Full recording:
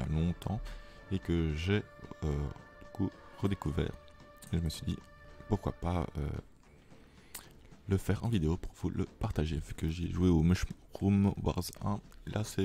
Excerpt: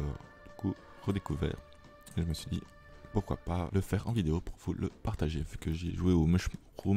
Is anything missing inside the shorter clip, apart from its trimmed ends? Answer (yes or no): yes